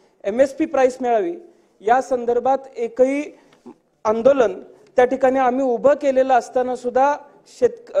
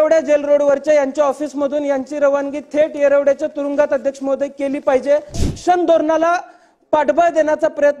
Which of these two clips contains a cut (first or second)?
second